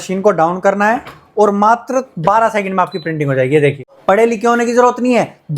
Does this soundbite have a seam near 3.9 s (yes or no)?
yes